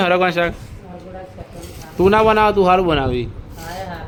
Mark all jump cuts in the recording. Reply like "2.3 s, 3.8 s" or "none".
none